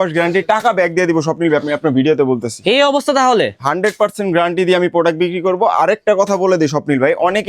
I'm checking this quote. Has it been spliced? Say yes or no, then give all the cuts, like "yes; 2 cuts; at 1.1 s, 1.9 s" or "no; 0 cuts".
no; 0 cuts